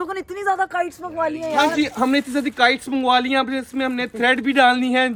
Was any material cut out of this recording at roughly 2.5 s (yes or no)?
no